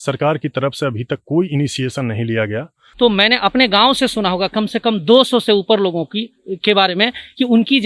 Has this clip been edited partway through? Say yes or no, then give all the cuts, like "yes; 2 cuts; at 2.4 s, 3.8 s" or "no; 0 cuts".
yes; 1 cut; at 2.8 s